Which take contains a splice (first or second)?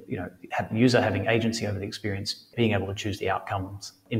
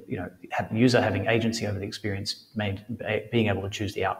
first